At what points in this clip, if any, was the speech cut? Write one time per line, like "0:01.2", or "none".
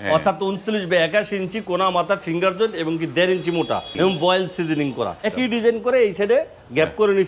0:03.9
0:05.3